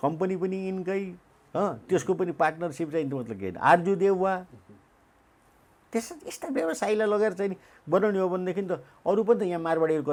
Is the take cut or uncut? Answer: uncut